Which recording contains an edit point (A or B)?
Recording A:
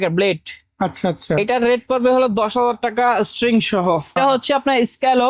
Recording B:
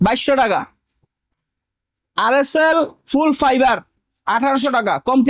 A